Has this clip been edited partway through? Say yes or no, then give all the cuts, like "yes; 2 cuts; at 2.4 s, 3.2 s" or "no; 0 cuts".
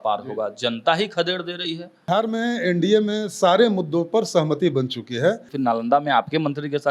yes; 2 cuts; at 2.1 s, 5.5 s